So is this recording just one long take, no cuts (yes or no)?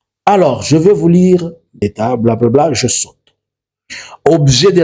no